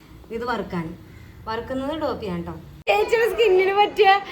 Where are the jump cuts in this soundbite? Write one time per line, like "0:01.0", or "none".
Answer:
0:02.7